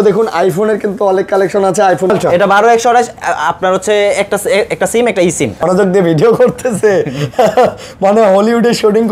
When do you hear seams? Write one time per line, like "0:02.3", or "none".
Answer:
0:02.1
0:05.6